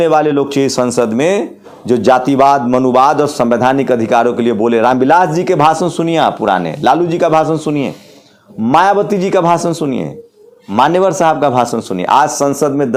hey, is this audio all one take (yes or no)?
yes